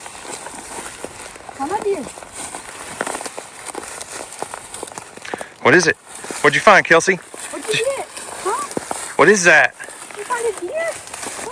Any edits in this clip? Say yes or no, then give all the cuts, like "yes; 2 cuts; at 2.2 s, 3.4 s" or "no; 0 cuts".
no; 0 cuts